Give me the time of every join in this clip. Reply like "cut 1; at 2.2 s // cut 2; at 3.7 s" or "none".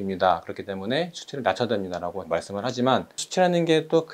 none